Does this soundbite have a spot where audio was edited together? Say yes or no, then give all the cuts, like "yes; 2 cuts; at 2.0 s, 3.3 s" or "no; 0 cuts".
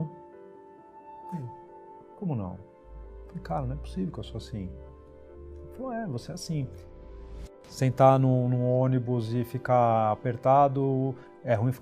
yes; 2 cuts; at 2.8 s, 7.2 s